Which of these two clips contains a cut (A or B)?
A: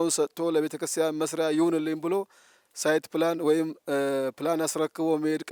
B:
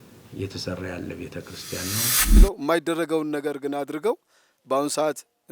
B